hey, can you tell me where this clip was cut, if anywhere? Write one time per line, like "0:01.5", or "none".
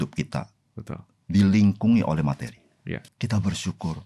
0:03.0